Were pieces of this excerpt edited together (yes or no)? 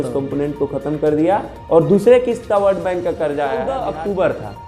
yes